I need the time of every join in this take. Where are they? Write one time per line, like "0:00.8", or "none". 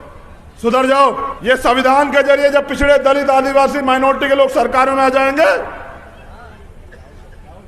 0:01.3